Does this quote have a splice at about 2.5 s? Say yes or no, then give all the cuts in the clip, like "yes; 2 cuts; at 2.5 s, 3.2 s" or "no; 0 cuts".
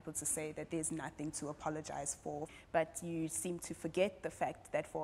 yes; 1 cut; at 2.5 s